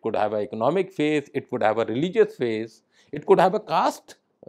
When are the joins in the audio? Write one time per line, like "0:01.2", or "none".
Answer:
none